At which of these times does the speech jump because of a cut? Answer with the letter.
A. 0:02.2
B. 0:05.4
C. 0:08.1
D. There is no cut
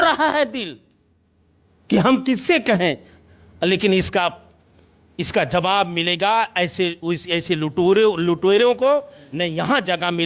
D